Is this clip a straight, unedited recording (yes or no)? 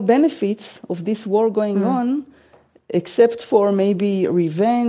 yes